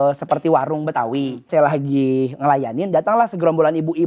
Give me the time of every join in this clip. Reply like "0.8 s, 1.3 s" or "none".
1.5 s